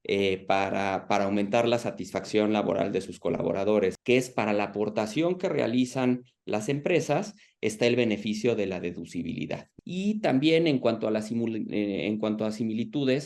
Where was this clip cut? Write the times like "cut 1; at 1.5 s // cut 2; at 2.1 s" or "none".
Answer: cut 1; at 4.0 s // cut 2; at 9.7 s

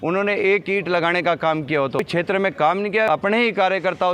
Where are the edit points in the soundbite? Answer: cut 1; at 2.0 s // cut 2; at 3.1 s

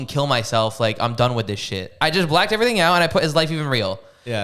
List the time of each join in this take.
cut 1; at 1.8 s

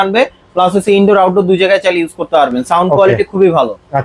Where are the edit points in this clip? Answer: none

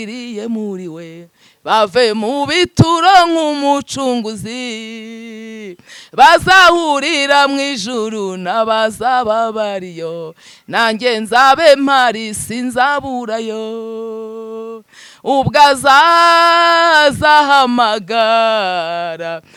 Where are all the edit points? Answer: none

